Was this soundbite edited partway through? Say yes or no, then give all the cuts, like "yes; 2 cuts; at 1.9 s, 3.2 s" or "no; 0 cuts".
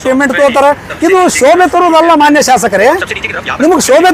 no; 0 cuts